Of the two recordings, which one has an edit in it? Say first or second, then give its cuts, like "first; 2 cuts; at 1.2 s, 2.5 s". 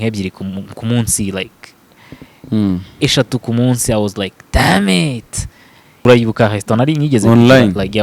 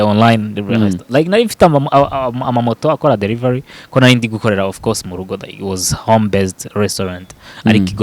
first; 1 cut; at 6.0 s